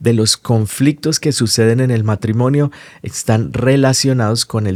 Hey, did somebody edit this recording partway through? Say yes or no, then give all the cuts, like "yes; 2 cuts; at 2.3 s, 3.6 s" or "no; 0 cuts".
no; 0 cuts